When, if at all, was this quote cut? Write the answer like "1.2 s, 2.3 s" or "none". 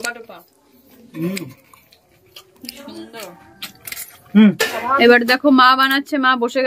4.7 s